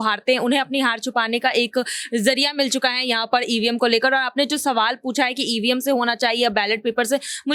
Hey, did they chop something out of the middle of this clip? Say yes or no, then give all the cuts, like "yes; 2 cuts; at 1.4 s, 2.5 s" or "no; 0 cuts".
no; 0 cuts